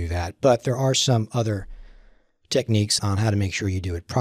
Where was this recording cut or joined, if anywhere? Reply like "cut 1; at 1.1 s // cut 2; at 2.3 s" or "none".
cut 1; at 2.9 s